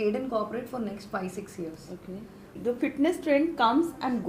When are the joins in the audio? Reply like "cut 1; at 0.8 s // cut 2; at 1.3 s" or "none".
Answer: cut 1; at 2.6 s